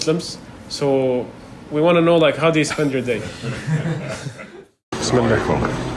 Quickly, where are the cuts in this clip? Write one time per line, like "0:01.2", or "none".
0:04.5